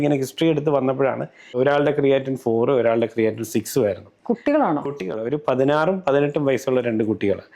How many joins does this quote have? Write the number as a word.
two